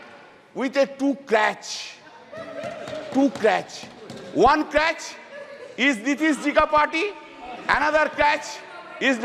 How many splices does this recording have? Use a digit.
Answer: 0